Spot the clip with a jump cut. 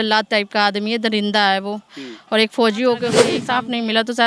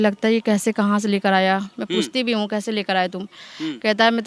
first; 1 cut; at 3.3 s

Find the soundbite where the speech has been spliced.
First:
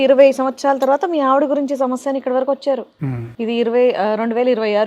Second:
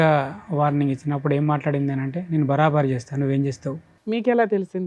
second; 1 cut; at 3.9 s

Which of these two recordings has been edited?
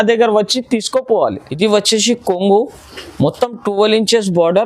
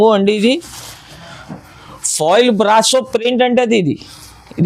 first; 1 cut; at 1.4 s

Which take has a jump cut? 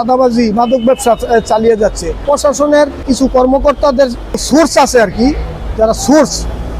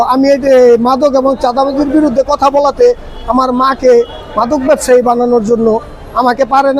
first; 3 cuts; at 2.2 s, 3.0 s, 4.4 s

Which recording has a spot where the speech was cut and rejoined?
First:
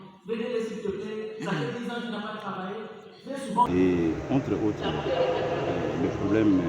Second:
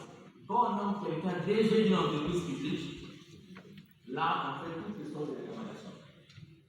first; 1 cut; at 3.7 s

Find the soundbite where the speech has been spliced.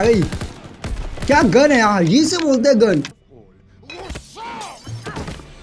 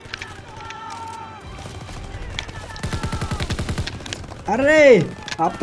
first; 1 cut; at 3.2 s

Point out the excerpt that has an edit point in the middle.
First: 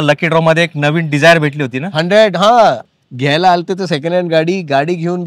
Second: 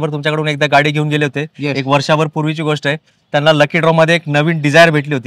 first; 1 cut; at 2.8 s

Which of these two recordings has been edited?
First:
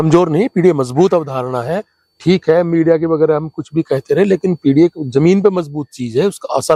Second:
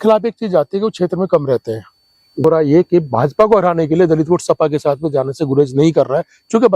second; 1 cut; at 2.4 s

